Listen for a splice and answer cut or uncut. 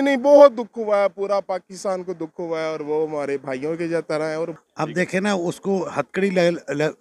cut